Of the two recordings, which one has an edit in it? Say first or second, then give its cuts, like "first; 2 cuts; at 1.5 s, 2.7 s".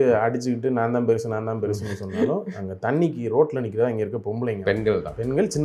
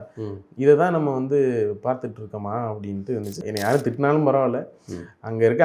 second; 1 cut; at 3.4 s